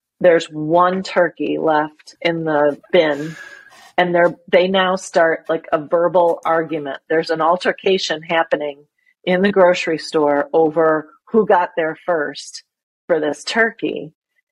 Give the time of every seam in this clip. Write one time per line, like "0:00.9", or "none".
none